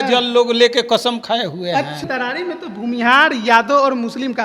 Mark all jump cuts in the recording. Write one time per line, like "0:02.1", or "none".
0:02.0